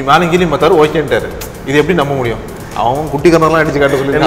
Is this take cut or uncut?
uncut